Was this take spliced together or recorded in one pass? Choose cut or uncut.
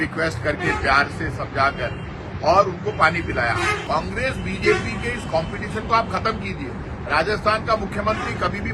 cut